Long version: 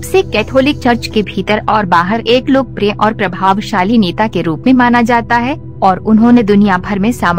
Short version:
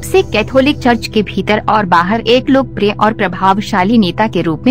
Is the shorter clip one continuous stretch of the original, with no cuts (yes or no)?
yes